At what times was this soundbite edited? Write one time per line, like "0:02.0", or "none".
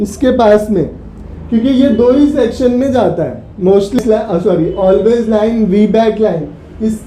0:04.0